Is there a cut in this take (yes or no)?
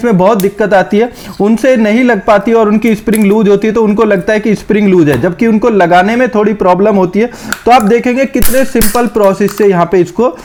no